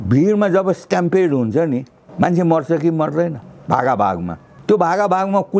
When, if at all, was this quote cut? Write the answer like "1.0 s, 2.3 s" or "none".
2.0 s, 3.5 s, 4.5 s